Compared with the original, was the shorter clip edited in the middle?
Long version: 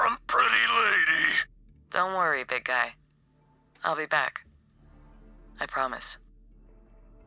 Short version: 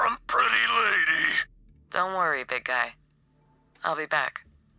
no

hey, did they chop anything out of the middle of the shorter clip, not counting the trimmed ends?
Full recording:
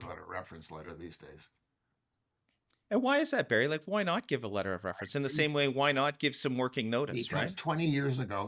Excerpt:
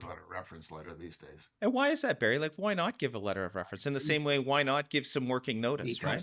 yes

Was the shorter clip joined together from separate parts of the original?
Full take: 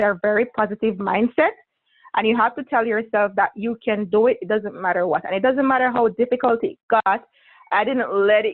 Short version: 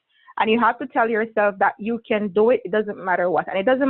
no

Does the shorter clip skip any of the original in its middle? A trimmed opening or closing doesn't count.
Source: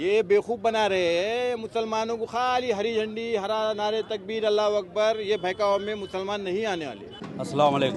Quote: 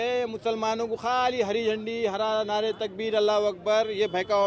no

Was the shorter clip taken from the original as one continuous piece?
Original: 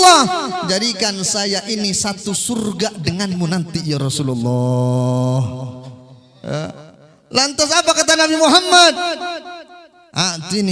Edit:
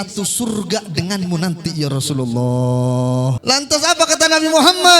no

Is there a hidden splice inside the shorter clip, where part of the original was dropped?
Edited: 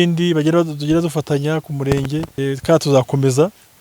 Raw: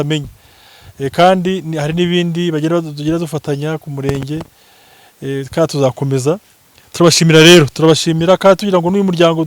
yes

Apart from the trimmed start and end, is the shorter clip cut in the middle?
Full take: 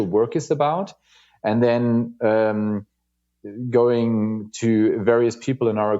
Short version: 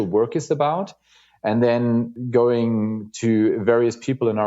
yes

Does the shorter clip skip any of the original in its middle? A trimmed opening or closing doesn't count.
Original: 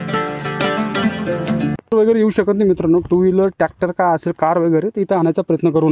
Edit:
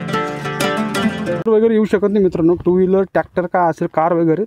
yes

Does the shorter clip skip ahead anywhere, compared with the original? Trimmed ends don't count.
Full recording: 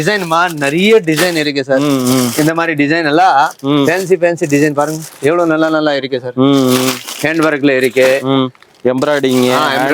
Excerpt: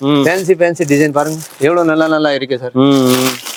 no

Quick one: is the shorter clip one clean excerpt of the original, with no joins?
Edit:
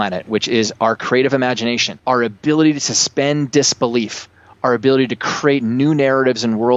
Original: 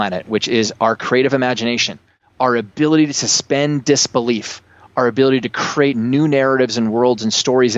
no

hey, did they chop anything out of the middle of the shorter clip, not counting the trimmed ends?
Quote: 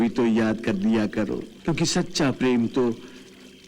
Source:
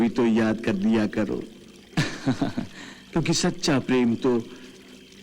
yes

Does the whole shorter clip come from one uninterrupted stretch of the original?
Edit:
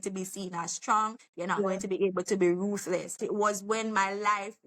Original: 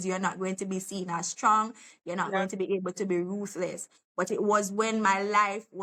no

